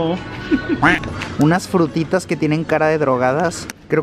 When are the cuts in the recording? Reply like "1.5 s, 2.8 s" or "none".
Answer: 0.9 s

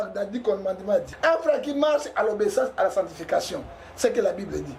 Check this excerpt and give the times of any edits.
1.1 s

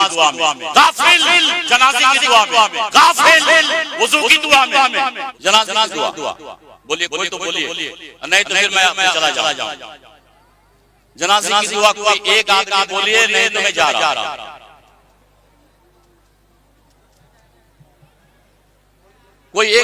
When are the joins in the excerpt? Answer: 5.3 s

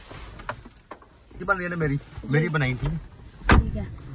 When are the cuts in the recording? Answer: 1.4 s

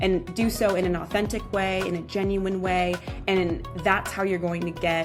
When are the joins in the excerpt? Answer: none

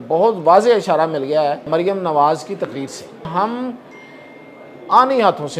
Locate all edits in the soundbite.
1.7 s, 3.3 s

